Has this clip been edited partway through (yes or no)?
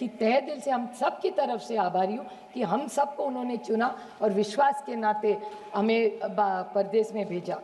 no